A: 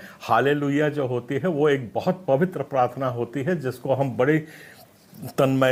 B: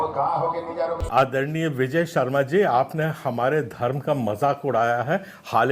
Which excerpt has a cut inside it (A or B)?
B